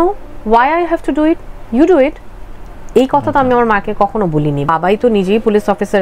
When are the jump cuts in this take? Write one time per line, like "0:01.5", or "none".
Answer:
none